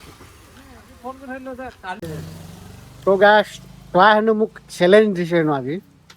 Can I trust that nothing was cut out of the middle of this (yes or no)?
no